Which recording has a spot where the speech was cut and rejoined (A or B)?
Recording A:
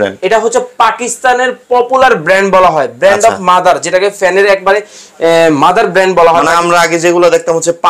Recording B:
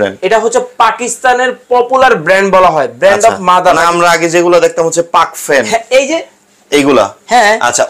B